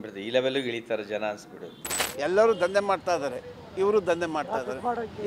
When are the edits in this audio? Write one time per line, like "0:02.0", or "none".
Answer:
0:02.0